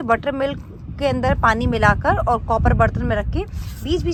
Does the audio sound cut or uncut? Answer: uncut